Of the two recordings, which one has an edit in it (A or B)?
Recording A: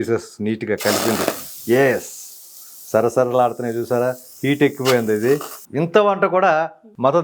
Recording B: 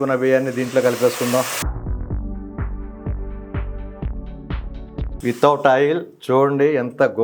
A